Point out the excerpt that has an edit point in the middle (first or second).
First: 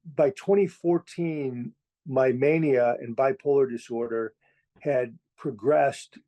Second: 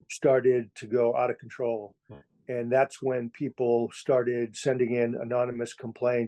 second